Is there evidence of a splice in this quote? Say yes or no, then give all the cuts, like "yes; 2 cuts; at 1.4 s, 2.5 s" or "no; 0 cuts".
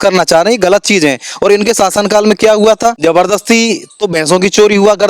yes; 1 cut; at 3.0 s